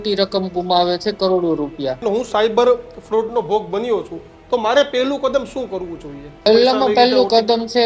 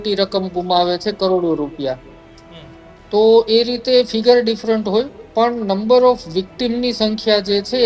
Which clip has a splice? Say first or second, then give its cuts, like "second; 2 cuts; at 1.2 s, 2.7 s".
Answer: first; 2 cuts; at 2.0 s, 6.5 s